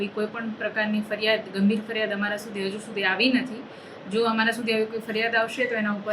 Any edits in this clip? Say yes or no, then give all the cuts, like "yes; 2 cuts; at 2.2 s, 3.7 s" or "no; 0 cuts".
no; 0 cuts